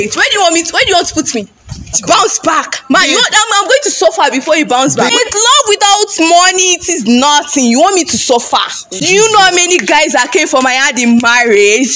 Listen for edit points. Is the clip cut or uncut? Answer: cut